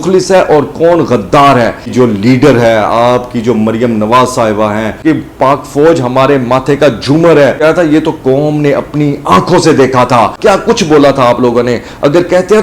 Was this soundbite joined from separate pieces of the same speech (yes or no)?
yes